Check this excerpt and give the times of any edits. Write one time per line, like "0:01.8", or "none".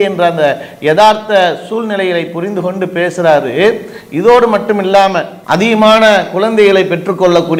none